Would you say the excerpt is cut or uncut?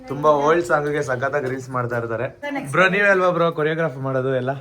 cut